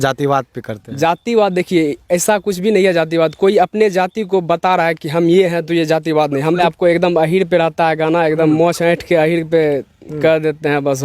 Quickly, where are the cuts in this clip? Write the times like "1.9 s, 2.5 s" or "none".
6.6 s